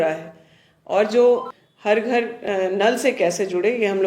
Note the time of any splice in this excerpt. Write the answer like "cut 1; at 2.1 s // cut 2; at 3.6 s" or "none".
cut 1; at 1.5 s